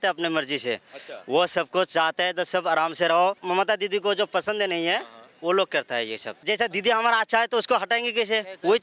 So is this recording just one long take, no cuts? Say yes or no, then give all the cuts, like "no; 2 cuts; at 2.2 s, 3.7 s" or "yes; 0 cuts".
no; 2 cuts; at 3.4 s, 6.4 s